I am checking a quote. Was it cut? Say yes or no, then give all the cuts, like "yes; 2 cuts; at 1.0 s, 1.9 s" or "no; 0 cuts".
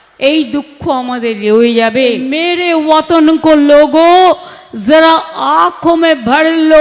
yes; 1 cut; at 2.4 s